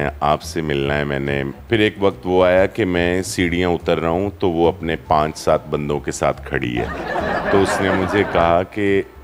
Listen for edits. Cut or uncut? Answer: cut